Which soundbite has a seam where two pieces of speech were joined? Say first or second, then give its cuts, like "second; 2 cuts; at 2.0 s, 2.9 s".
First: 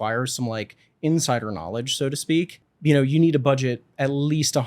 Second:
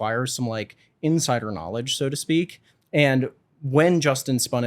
first; 1 cut; at 2.6 s